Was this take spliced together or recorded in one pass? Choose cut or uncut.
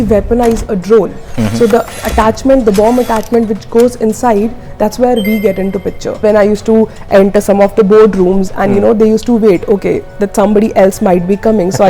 cut